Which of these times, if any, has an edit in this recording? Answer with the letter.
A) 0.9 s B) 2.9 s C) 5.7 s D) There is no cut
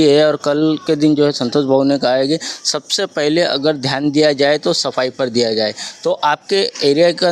D